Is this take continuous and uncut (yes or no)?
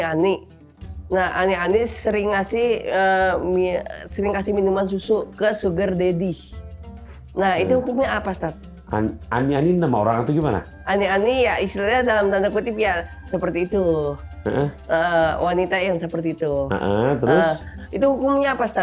no